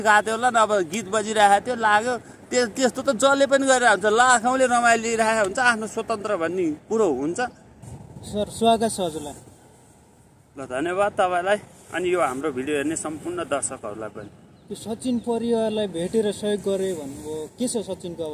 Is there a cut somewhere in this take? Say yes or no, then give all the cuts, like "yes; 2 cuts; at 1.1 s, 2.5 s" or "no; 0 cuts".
no; 0 cuts